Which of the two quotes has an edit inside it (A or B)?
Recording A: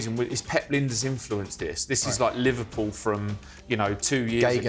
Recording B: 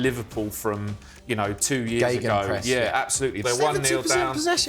B